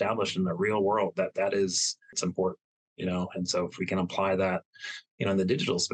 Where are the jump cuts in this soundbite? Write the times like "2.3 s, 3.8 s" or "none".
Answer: 2.1 s